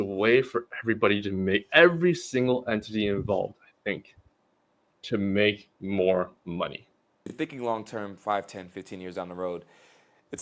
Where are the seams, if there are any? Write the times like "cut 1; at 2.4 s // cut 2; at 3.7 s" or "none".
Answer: cut 1; at 7.3 s